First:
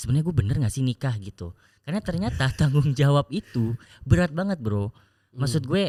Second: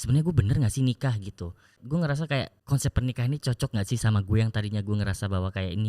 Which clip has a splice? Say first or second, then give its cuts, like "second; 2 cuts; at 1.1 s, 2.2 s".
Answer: second; 2 cuts; at 1.8 s, 2.6 s